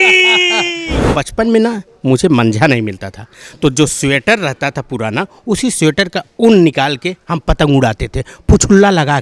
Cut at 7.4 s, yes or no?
no